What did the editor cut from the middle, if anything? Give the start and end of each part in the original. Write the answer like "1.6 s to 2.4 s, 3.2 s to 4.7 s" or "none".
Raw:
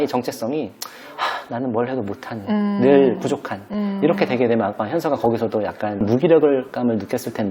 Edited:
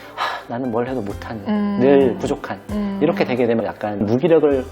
4.8 s to 5.8 s